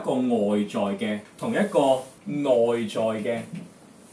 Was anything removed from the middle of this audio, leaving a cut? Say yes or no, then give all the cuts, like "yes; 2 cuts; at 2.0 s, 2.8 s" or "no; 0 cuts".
yes; 2 cuts; at 1.3 s, 2.1 s